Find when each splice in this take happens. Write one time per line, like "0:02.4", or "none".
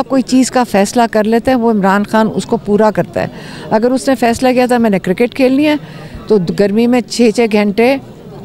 none